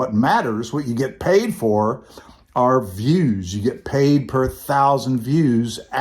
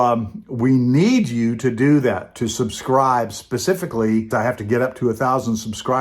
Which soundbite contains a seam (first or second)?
second